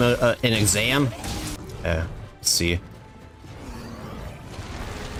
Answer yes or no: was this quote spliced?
no